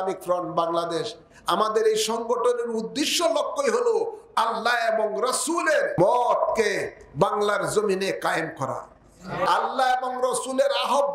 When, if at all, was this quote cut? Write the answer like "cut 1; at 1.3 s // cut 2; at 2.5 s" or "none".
cut 1; at 6.0 s // cut 2; at 9.5 s

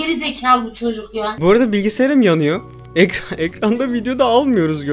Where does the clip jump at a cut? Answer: cut 1; at 1.4 s

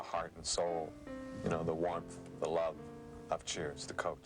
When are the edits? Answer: cut 1; at 3.1 s

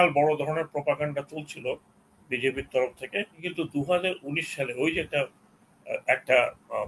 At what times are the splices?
cut 1; at 3.5 s

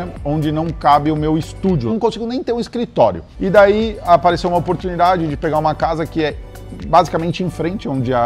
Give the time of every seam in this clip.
cut 1; at 1.9 s

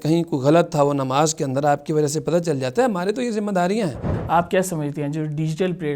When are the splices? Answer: cut 1; at 4.1 s

